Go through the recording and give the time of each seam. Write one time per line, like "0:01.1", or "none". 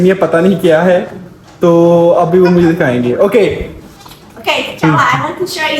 none